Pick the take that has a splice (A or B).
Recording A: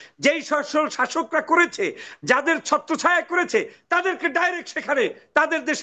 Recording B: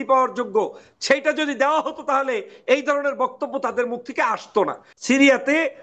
B